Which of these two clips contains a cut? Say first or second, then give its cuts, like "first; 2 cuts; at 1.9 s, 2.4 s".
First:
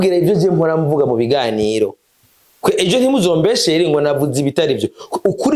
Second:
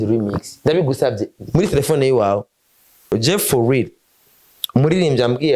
second; 1 cut; at 3.1 s